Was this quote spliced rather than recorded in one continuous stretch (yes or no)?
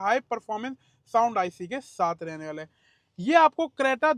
no